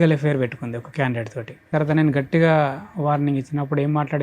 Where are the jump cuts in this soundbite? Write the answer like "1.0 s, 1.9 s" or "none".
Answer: 1.7 s